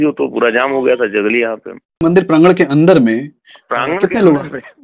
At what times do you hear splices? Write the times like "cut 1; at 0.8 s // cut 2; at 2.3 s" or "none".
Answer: cut 1; at 2.0 s